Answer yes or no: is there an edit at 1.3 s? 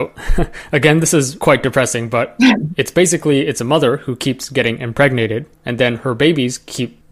yes